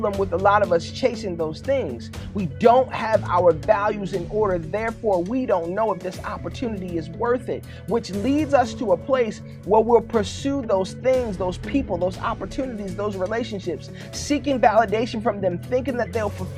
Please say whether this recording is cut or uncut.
uncut